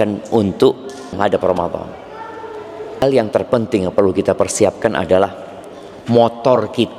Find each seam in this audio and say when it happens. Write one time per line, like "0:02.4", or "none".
0:01.2
0:03.0